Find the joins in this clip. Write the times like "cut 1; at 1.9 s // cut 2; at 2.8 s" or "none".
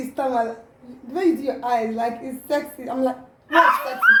none